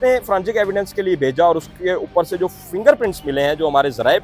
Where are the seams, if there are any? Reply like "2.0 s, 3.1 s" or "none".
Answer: none